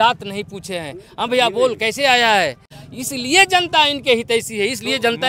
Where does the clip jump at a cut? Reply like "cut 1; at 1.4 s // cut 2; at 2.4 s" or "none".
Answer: cut 1; at 2.8 s